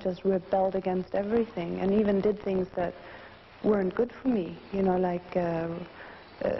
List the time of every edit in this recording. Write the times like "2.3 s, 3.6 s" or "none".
3.8 s